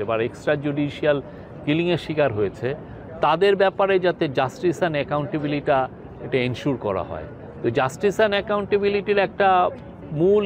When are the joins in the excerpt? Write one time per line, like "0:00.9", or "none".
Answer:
none